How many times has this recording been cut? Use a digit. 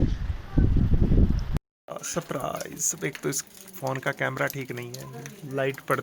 2